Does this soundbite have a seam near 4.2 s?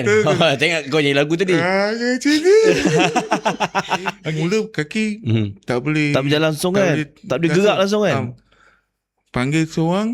yes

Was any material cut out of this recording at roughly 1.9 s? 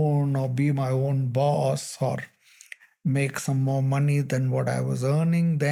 no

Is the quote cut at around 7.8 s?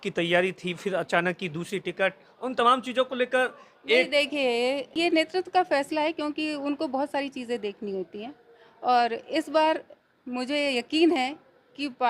no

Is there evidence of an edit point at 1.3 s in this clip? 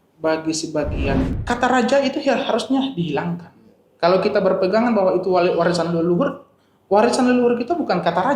yes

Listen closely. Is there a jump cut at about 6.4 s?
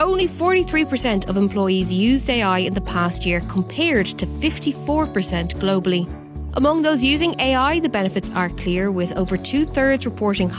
no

